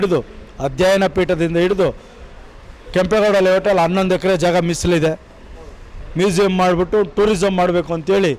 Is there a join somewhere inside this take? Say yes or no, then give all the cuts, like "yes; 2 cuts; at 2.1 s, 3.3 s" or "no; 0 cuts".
no; 0 cuts